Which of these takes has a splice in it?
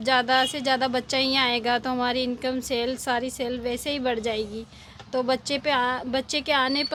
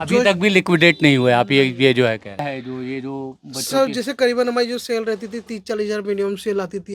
second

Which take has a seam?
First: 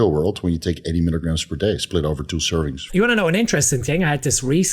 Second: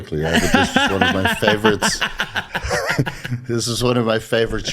first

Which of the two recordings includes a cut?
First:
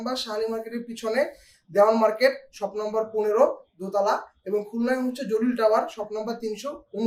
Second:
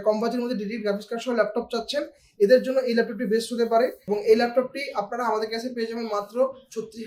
second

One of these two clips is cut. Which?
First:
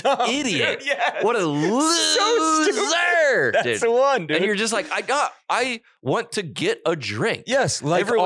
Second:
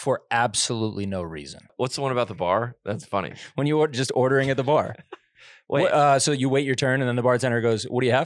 second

